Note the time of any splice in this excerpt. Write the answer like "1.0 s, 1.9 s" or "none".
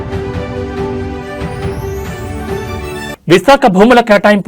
3.1 s